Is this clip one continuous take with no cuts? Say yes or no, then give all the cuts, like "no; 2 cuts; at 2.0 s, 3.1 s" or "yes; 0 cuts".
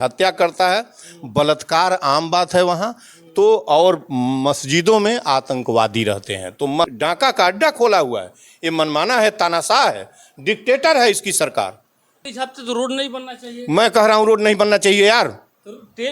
no; 2 cuts; at 6.9 s, 12.2 s